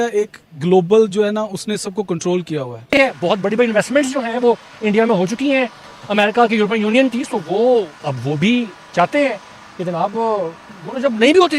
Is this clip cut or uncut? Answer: cut